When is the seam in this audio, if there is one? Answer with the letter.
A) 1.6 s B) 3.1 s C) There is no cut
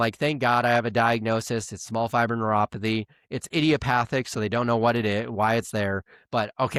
C